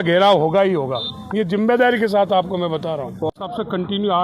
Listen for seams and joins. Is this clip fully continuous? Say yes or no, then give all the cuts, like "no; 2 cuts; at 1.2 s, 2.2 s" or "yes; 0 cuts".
no; 1 cut; at 3.3 s